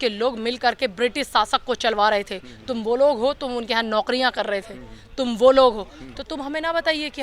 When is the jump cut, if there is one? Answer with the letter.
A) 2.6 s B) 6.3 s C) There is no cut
C